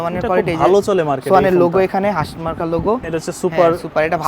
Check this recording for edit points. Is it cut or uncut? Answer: cut